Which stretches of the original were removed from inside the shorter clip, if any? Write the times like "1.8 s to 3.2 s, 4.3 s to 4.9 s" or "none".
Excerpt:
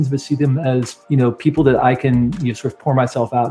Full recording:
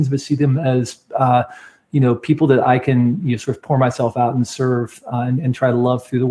1.0 s to 1.8 s

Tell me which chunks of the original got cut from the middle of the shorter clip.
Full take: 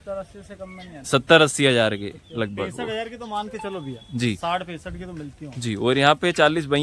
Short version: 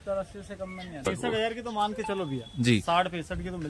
1.0 s to 2.5 s

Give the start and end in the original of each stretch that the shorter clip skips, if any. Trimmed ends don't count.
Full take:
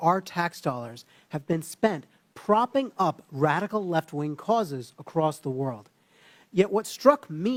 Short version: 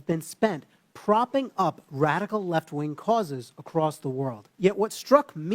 5.8 s to 6.4 s

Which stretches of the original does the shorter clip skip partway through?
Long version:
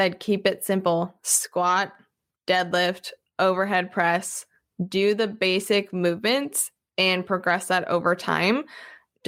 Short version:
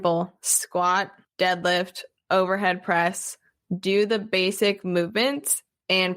2.0 s to 2.3 s

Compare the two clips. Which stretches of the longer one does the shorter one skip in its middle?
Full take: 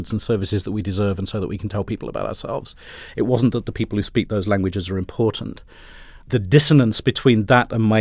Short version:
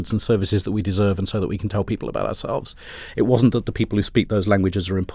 none

